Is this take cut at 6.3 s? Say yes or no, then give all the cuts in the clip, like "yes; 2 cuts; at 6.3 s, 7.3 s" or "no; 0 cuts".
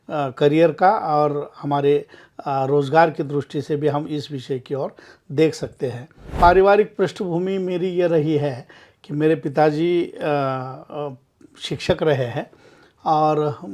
yes; 1 cut; at 6.3 s